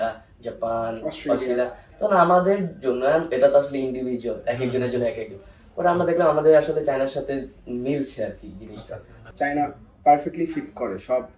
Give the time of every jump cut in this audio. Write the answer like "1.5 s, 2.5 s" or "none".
9.1 s